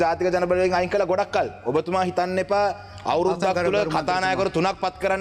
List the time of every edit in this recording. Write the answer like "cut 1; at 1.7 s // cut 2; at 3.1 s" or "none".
none